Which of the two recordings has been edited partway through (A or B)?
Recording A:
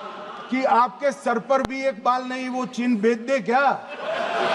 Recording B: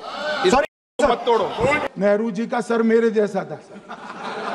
B